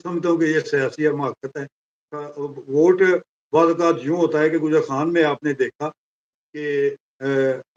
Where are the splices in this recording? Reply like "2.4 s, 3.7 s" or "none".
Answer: none